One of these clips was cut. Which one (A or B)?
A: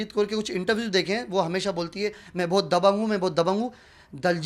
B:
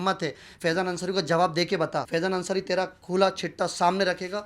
B